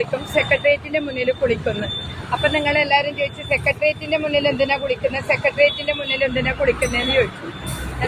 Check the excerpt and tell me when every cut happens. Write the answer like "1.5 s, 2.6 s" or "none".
none